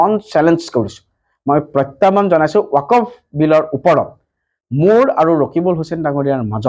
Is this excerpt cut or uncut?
uncut